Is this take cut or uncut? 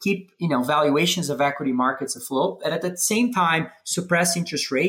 uncut